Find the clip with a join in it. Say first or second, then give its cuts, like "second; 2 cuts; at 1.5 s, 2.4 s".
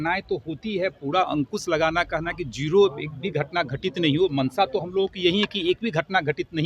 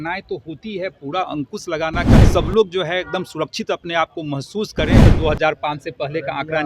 second; 2 cuts; at 2.1 s, 5.0 s